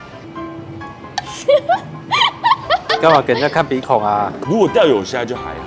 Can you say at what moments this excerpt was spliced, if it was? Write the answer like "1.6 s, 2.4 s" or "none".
4.4 s